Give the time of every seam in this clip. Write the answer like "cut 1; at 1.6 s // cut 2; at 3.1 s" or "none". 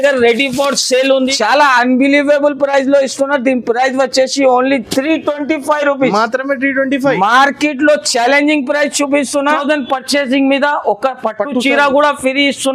cut 1; at 1.2 s // cut 2; at 9.6 s